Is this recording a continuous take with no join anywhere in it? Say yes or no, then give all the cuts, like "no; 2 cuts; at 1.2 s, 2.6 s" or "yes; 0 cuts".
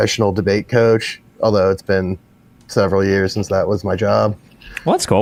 yes; 0 cuts